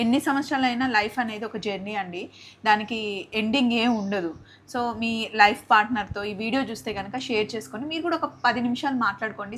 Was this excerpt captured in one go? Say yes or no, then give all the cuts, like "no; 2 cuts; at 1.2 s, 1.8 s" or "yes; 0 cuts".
yes; 0 cuts